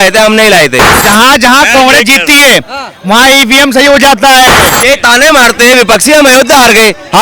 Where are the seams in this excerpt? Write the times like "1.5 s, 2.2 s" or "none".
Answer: 0.9 s, 4.7 s

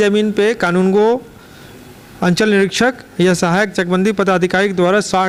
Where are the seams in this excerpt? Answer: none

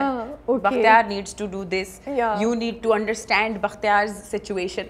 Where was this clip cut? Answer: none

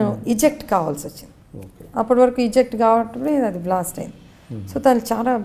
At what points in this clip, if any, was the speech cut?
none

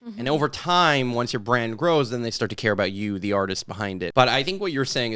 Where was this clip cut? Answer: 4.1 s

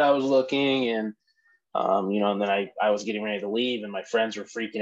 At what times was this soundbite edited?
none

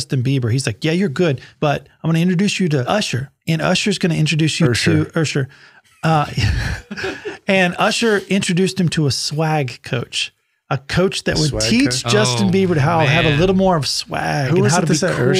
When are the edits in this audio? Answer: 1.5 s, 3.0 s

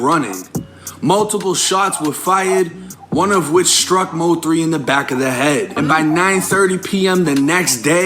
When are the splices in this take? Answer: 5.7 s

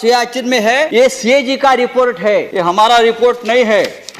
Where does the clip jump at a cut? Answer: 0.9 s, 2.5 s

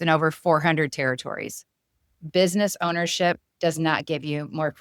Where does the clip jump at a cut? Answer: 2.3 s

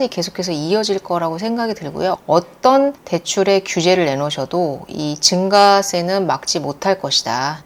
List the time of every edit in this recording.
none

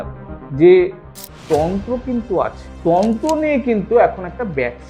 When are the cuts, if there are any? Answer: 2.6 s

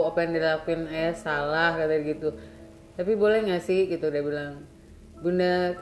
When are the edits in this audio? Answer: none

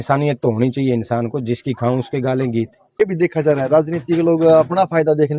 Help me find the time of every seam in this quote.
2.8 s

